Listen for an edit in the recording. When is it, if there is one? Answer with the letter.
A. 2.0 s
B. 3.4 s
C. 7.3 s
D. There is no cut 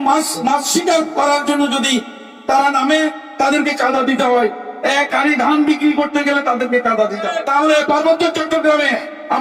C